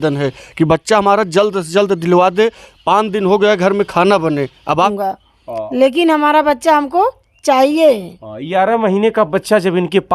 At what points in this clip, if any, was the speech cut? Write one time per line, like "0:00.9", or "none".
0:04.9